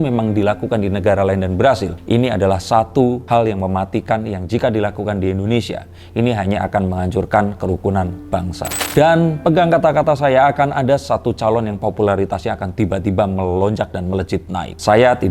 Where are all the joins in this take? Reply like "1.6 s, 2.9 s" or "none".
1.9 s, 3.2 s, 8.7 s